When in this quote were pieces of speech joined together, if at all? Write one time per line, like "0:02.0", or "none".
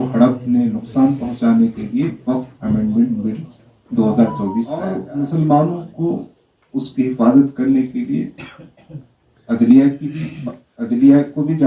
0:05.0